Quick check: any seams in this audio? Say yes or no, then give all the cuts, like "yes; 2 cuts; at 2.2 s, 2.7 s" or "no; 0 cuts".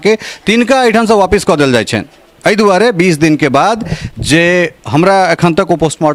no; 0 cuts